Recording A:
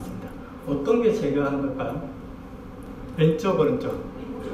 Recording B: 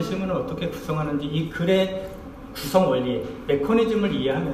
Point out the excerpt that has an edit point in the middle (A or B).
A